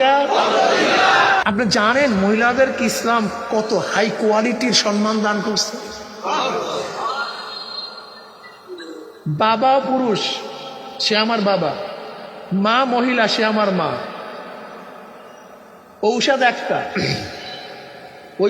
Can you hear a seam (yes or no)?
yes